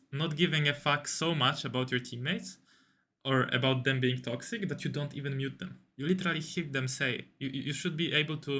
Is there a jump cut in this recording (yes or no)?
no